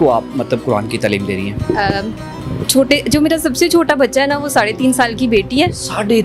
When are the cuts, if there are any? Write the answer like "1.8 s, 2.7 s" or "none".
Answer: none